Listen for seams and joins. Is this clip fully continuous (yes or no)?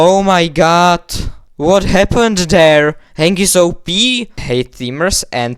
no